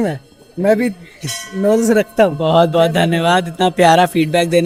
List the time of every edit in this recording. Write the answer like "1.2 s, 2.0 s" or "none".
none